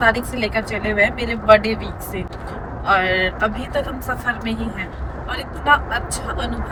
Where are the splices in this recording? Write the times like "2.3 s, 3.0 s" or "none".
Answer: none